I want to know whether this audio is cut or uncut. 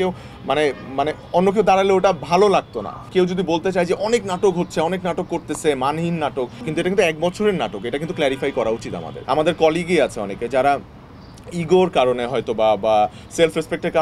cut